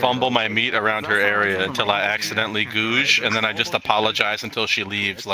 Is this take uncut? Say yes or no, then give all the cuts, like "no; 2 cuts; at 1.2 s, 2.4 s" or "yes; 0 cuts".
yes; 0 cuts